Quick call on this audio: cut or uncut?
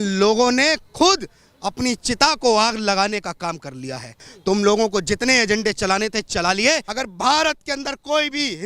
cut